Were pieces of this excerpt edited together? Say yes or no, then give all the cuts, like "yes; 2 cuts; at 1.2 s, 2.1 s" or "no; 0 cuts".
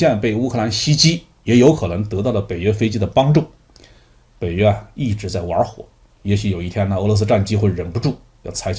no; 0 cuts